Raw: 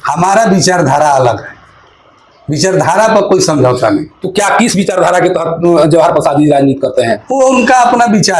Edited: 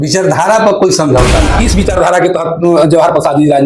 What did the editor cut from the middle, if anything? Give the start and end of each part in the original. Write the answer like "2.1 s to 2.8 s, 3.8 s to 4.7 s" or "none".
4.1 s to 4.6 s